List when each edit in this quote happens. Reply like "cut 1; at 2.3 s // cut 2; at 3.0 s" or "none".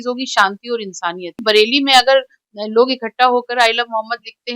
cut 1; at 1.4 s